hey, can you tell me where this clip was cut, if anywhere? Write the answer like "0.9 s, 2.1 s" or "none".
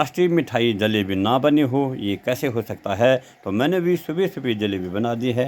none